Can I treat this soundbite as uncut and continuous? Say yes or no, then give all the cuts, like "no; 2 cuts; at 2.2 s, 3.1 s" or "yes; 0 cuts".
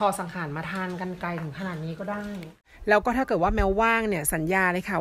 no; 1 cut; at 2.7 s